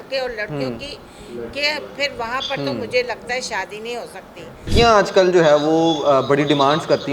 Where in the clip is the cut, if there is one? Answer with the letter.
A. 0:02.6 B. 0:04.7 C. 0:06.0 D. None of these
B